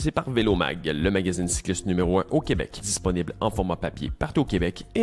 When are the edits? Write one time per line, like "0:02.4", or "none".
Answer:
0:02.8